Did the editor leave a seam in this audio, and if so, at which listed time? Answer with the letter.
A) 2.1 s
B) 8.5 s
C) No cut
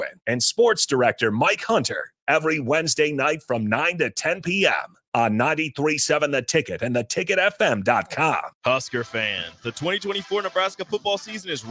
B